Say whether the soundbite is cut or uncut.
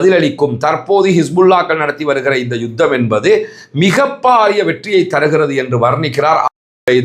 uncut